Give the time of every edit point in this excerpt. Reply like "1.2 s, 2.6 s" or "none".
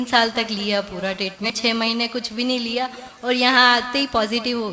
1.5 s